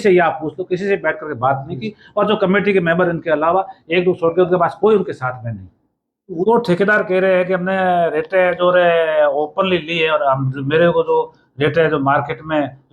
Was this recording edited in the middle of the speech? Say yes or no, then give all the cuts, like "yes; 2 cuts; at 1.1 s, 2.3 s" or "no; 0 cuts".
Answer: yes; 1 cut; at 6.4 s